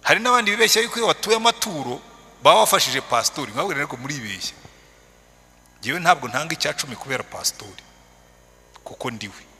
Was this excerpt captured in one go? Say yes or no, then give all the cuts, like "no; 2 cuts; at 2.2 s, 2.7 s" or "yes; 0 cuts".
yes; 0 cuts